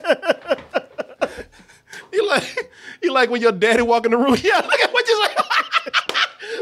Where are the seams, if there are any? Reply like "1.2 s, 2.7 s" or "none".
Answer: none